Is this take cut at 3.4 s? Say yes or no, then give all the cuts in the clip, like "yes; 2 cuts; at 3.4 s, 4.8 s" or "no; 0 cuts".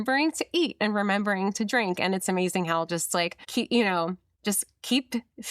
yes; 2 cuts; at 3.4 s, 4.3 s